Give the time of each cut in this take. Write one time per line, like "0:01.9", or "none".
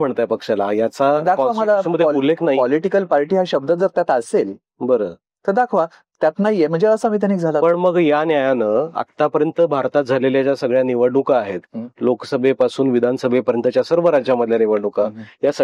none